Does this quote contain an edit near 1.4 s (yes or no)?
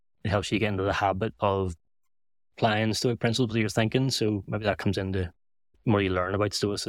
no